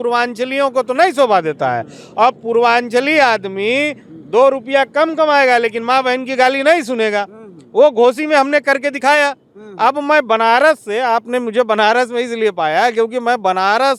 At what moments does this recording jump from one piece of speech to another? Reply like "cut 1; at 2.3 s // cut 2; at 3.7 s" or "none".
none